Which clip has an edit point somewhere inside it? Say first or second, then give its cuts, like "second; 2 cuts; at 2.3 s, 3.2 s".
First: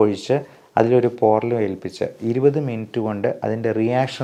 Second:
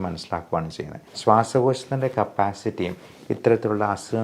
second; 1 cut; at 1.0 s